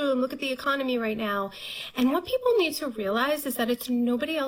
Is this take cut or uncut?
uncut